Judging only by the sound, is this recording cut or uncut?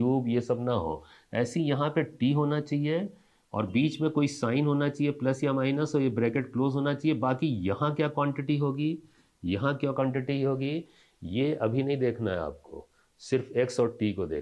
uncut